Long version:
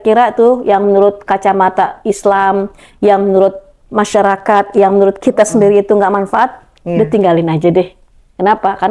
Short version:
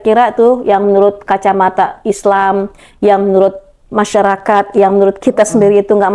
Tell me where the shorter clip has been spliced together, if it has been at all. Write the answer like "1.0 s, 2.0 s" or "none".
none